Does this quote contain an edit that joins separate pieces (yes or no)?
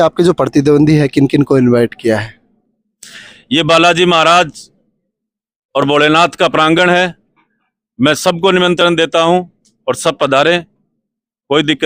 no